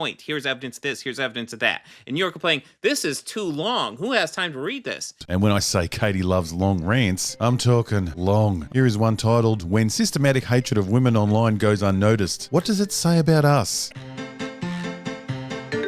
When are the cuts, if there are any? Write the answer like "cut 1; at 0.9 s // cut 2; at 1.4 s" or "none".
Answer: cut 1; at 5.2 s

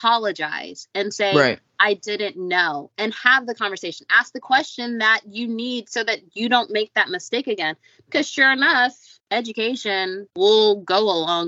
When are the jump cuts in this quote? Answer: cut 1; at 9.1 s // cut 2; at 10.3 s

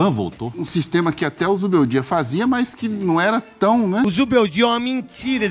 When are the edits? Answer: cut 1; at 4.1 s

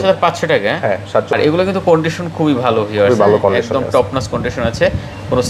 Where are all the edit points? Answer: cut 1; at 1.3 s

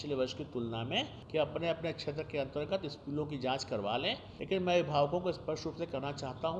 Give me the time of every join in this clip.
cut 1; at 1.2 s // cut 2; at 4.3 s

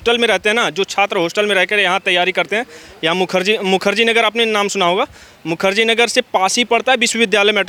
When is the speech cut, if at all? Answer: none

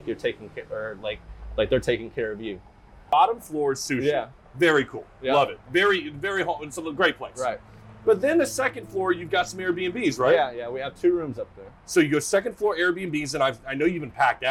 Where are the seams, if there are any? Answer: cut 1; at 3.1 s

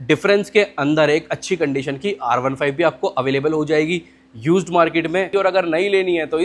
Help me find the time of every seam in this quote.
cut 1; at 5.3 s

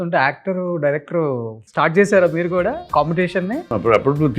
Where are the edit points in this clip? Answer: cut 1; at 1.6 s // cut 2; at 2.8 s // cut 3; at 3.7 s

